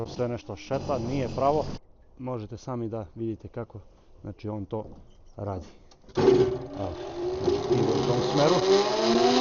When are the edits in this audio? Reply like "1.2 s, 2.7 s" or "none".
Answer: 1.8 s